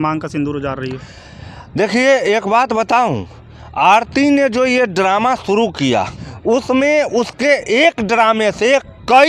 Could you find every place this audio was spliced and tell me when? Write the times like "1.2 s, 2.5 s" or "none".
6.2 s